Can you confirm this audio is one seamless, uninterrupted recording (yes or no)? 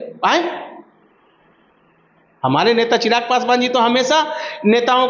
yes